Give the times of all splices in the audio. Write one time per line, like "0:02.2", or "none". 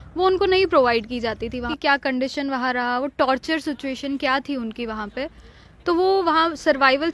0:01.7